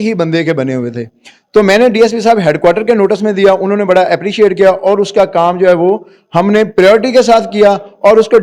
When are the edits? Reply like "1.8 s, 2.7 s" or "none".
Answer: none